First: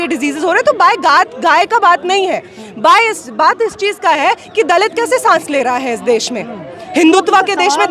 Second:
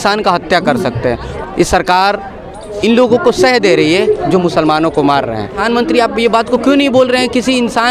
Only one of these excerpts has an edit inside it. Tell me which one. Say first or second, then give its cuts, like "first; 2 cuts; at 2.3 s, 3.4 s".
second; 2 cuts; at 1.3 s, 5.6 s